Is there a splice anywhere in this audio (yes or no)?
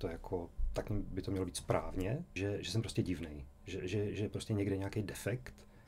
yes